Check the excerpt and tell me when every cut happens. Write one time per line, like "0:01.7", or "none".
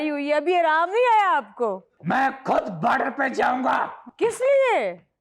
0:01.9

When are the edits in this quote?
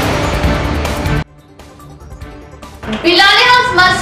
0:01.1
0:02.8

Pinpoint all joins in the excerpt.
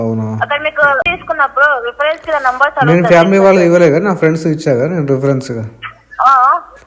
0:01.0

